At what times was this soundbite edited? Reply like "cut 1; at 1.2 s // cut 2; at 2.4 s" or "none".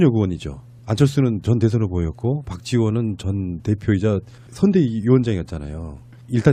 none